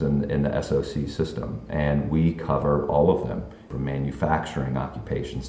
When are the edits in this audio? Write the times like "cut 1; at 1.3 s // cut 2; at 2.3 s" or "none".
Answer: cut 1; at 3.6 s

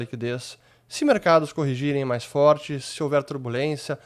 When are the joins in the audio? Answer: none

